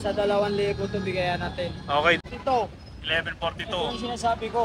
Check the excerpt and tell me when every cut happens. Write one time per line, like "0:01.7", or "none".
0:02.2